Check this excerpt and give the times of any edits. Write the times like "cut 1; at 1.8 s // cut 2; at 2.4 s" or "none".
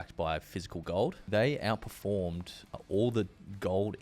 cut 1; at 1.2 s // cut 2; at 2.8 s